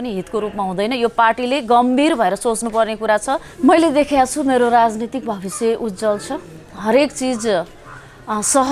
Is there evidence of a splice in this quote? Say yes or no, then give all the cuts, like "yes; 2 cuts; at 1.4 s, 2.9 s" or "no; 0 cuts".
yes; 1 cut; at 3.5 s